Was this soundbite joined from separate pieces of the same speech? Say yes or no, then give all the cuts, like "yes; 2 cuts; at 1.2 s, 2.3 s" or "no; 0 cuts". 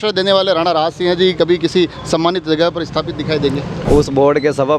yes; 1 cut; at 3.7 s